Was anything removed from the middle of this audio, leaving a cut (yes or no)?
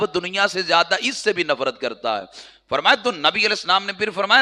no